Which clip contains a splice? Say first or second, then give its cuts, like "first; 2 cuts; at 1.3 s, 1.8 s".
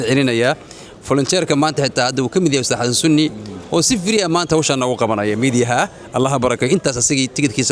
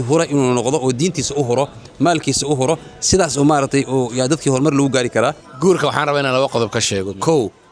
second; 1 cut; at 5.5 s